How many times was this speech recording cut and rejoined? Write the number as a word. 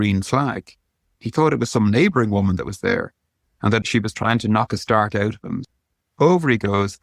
two